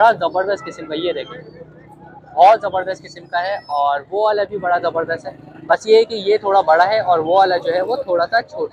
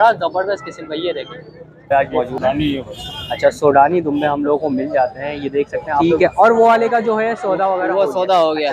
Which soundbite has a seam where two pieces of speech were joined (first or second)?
second